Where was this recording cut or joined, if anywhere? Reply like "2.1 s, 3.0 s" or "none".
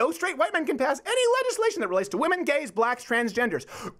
none